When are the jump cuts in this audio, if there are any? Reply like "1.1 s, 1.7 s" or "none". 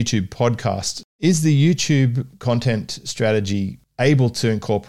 1.0 s